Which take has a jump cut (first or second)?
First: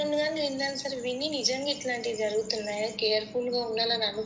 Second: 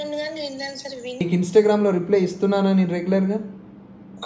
second